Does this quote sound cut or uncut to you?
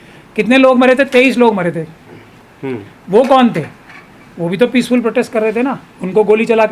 uncut